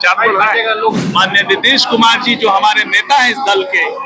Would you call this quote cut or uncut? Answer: cut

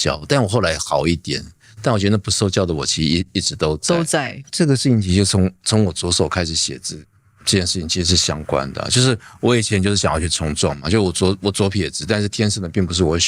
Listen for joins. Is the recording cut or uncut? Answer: cut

